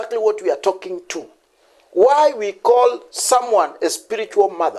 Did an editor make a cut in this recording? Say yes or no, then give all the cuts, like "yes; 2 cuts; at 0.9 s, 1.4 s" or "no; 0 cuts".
no; 0 cuts